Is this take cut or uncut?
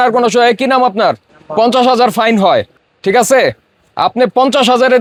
uncut